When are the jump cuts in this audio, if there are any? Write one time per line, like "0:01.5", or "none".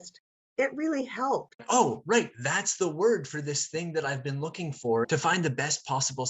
0:01.6
0:05.0